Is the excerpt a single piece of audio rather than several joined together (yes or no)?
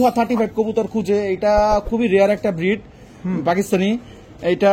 yes